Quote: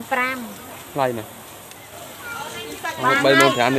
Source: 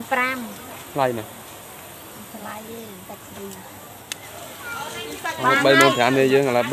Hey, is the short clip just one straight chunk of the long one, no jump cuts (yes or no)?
no